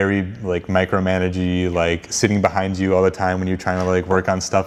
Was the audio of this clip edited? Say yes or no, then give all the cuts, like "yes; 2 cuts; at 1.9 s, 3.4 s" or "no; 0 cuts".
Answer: no; 0 cuts